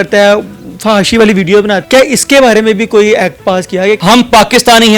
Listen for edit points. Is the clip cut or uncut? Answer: cut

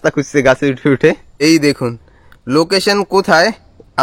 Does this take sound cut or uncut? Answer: cut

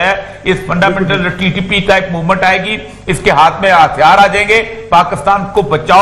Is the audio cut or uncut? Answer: uncut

